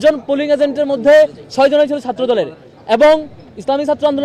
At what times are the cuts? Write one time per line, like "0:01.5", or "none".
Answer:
none